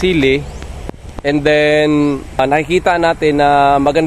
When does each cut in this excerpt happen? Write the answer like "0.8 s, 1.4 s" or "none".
2.4 s